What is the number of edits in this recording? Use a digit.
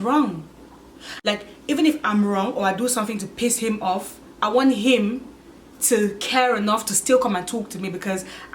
1